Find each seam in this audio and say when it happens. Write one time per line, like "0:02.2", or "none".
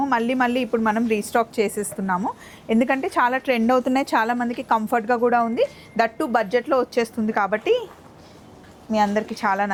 none